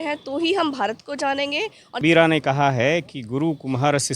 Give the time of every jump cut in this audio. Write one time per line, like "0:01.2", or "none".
0:02.0